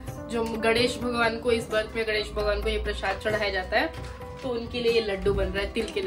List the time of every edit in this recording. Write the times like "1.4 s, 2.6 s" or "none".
none